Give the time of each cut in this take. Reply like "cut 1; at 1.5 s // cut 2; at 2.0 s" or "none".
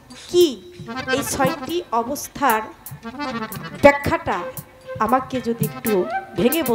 none